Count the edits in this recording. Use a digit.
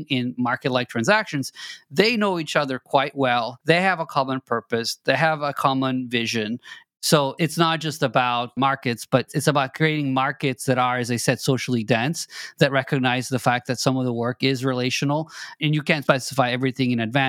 4